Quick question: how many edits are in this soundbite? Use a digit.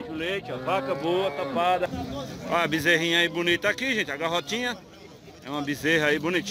1